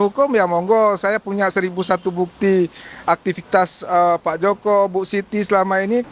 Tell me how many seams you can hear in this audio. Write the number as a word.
zero